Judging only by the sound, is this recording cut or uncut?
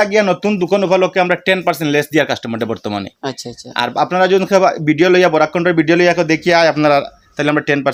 uncut